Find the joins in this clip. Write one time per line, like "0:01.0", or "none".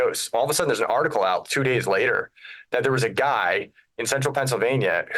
none